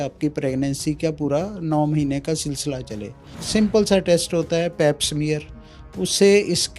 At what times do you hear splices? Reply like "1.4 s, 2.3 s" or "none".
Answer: 3.3 s